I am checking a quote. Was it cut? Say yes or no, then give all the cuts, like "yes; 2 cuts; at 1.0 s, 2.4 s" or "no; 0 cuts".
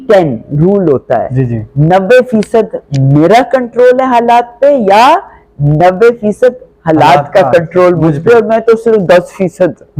no; 0 cuts